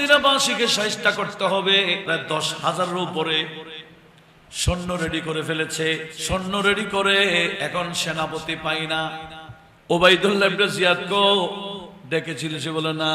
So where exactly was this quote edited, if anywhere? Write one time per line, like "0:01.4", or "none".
0:02.0
0:06.1
0:07.6

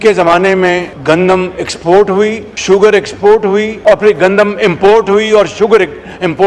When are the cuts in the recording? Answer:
0:00.9
0:02.5
0:03.7

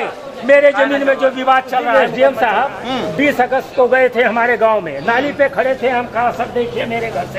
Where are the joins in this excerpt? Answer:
0:01.9

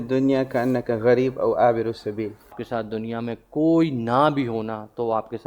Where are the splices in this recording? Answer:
0:02.6

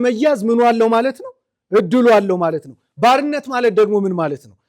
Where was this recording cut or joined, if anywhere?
none

